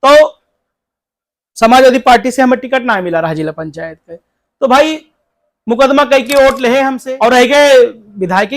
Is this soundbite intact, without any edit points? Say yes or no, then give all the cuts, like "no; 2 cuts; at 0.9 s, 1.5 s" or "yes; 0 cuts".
no; 1 cut; at 7.0 s